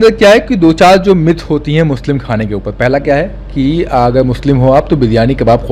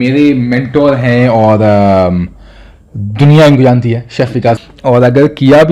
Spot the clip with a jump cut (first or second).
second